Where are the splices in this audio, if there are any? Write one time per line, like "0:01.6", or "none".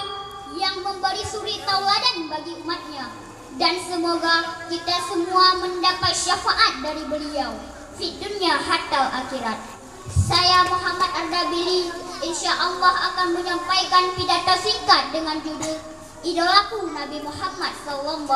0:10.3